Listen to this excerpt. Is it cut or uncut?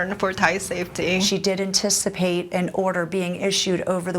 cut